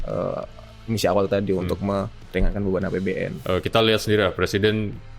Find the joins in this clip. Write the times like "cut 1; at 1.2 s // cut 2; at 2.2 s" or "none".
cut 1; at 3.4 s